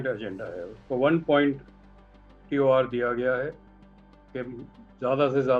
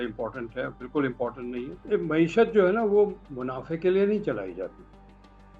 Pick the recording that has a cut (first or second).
second